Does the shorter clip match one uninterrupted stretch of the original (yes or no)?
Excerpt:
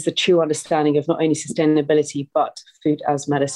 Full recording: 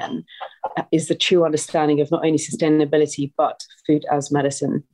yes